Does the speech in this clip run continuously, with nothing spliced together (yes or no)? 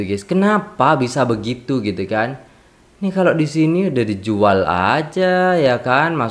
yes